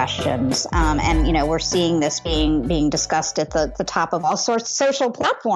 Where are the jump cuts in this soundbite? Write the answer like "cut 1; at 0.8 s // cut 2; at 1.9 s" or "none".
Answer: none